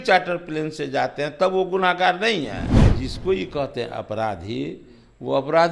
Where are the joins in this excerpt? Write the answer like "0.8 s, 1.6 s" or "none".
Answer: 2.9 s